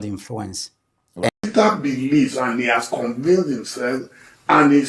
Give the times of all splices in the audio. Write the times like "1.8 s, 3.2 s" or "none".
1.3 s